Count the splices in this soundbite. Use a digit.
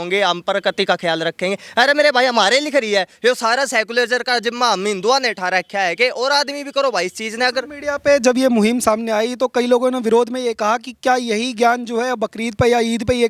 0